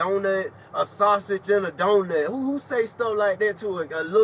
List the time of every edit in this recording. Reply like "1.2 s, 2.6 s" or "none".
none

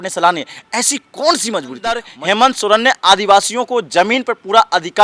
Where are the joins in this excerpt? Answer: 2.1 s

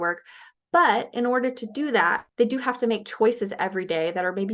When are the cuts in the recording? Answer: 2.2 s

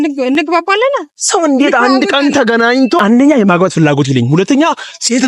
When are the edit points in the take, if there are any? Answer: 3.0 s

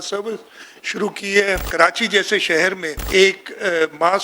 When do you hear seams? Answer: 1.7 s, 2.9 s

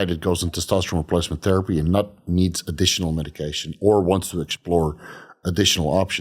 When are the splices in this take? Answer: none

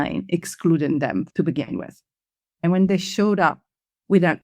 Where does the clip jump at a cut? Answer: 1.3 s, 2.6 s

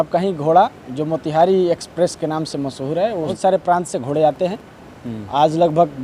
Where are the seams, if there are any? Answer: 3.3 s

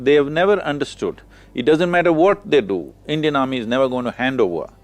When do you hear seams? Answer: none

